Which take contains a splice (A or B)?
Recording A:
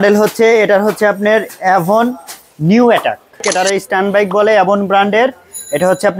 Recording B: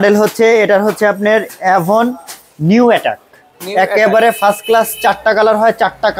A